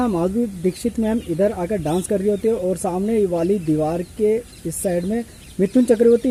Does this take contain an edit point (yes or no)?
no